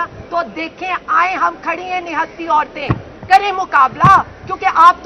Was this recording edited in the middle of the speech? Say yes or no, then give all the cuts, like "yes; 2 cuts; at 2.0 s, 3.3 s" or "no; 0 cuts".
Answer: no; 0 cuts